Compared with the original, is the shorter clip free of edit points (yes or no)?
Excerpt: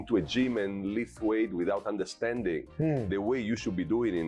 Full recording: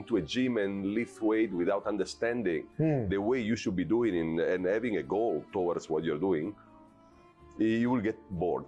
yes